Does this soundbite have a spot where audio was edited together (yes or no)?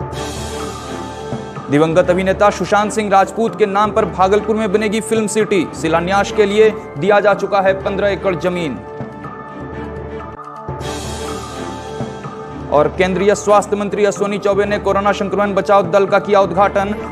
yes